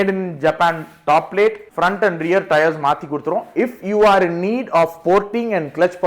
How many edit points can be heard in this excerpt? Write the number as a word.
one